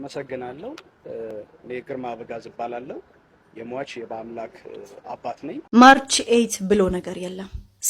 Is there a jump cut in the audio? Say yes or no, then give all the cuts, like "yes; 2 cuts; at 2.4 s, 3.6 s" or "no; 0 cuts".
yes; 1 cut; at 5.7 s